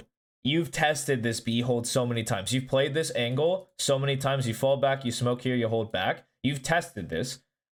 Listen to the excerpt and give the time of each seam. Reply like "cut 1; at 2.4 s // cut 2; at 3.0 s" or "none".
none